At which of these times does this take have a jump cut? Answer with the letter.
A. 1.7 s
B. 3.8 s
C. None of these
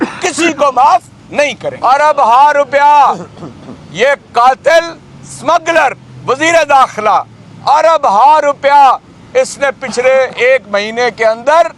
A